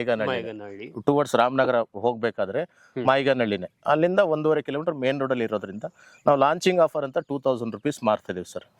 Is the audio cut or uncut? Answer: uncut